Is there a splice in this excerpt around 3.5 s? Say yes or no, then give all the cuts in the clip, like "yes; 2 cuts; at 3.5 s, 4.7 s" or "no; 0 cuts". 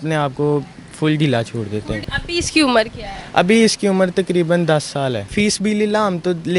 no; 2 cuts; at 2.0 s, 5.3 s